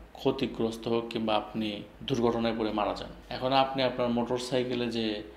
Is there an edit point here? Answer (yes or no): yes